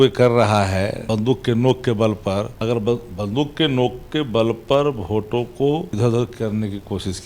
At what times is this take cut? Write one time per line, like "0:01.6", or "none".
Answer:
0:01.0
0:02.5
0:05.9